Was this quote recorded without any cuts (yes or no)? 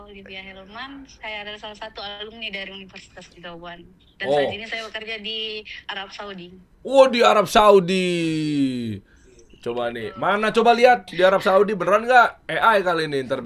yes